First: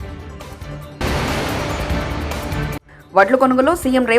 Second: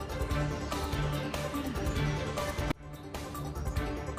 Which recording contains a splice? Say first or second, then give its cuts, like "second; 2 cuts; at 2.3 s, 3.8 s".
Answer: first; 2 cuts; at 1.0 s, 2.9 s